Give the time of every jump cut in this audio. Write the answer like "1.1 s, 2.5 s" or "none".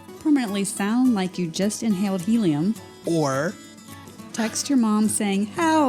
2.9 s

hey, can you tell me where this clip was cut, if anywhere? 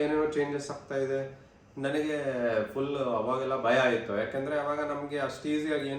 none

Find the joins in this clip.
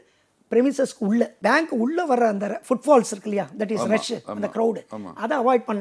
1.3 s

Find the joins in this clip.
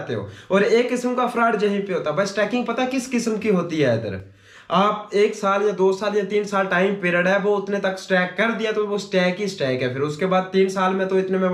none

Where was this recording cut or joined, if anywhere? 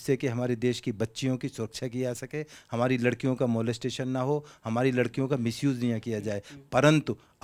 none

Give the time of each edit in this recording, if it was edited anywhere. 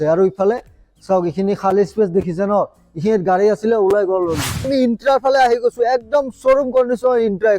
4.7 s

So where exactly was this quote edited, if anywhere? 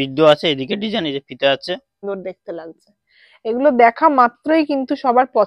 2.0 s

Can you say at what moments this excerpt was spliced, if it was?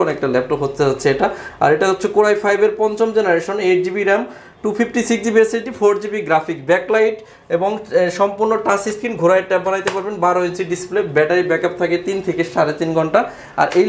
none

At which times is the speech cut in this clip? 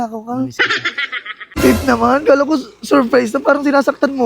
1.3 s

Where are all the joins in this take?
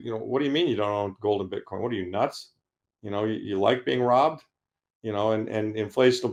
none

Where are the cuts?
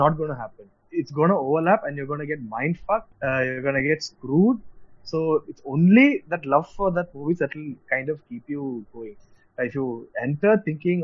none

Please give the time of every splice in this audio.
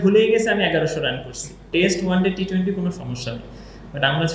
1.6 s

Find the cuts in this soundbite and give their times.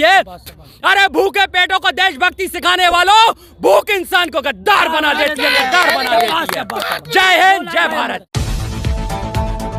none

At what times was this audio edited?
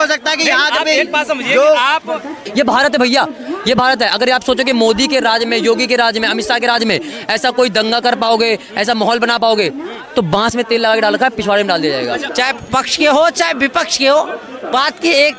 2.5 s, 12.3 s

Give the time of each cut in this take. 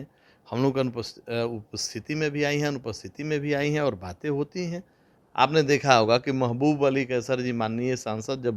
5.2 s

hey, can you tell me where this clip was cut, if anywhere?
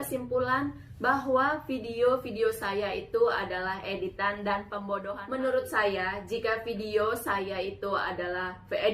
5.1 s

